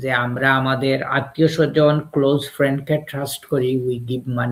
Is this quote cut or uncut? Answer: uncut